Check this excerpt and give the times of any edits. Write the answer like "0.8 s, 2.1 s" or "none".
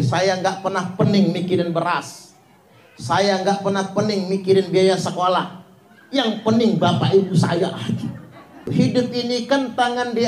8.7 s